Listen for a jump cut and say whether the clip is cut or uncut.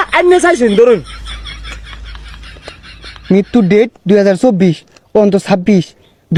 uncut